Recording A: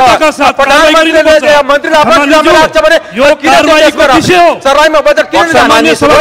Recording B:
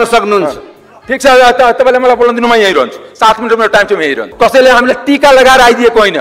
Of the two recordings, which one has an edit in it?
B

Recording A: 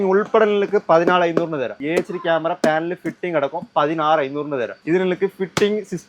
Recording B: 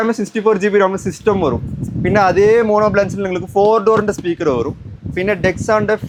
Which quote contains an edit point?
A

